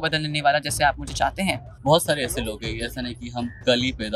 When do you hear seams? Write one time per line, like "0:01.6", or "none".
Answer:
0:01.7